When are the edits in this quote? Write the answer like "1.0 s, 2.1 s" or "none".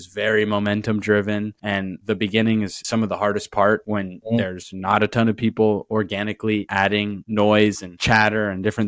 6.7 s